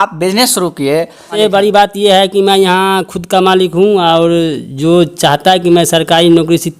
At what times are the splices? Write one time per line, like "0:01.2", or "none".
0:01.3